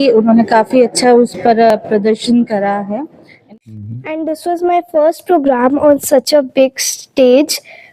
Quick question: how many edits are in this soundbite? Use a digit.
1